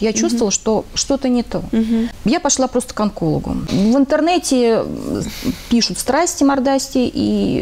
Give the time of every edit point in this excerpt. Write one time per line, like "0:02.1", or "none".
0:02.1
0:03.6